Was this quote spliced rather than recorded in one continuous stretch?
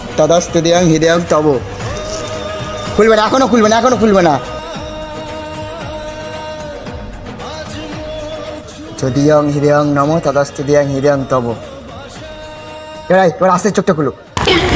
yes; 1 cut; at 4.5 s

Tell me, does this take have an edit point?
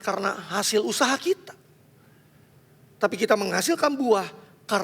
no; 0 cuts

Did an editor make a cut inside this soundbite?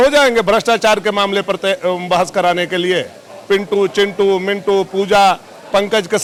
no; 0 cuts

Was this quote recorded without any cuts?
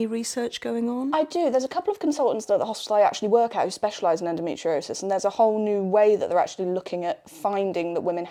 yes; 0 cuts

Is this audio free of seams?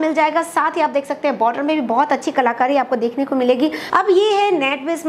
no; 1 cut; at 3.8 s

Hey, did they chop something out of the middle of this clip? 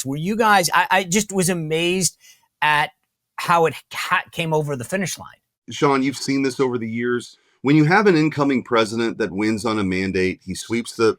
yes; 1 cut; at 5.6 s

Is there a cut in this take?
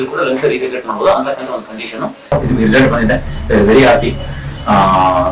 yes; 1 cut; at 2.4 s

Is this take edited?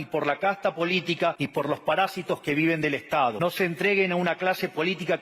yes; 2 cuts; at 1.4 s, 3.4 s

